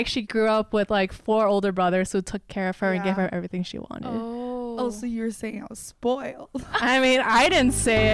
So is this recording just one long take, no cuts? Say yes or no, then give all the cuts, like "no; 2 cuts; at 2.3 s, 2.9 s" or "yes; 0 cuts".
yes; 0 cuts